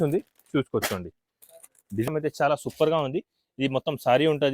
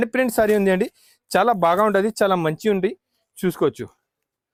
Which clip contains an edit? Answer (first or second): first